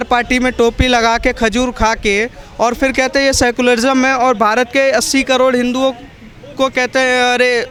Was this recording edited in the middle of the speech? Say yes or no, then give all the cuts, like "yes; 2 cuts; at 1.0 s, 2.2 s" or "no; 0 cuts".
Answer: no; 0 cuts